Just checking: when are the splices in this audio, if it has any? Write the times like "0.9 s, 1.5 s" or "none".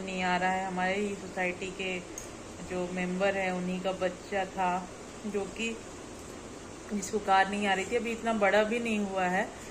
none